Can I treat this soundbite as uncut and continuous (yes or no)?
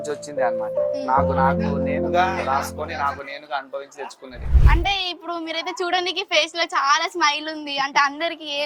yes